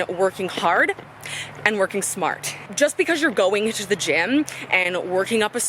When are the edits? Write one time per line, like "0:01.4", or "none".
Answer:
0:02.6